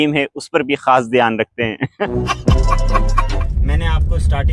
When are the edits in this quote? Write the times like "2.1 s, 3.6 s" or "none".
3.3 s